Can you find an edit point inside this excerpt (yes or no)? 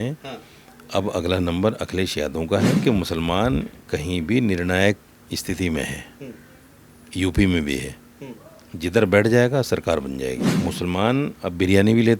yes